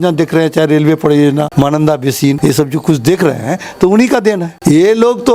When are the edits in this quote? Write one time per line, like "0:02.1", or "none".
0:01.5
0:02.4
0:04.5